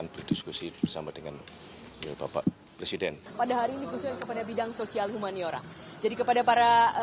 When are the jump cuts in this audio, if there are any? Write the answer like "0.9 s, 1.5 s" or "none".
3.2 s